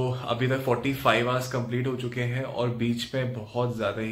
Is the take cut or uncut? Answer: uncut